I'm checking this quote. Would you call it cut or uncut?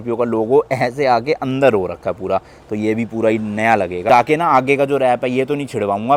uncut